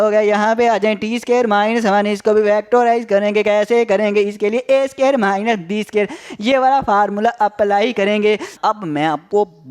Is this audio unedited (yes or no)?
no